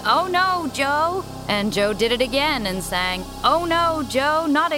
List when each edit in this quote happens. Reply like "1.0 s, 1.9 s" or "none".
1.3 s, 3.2 s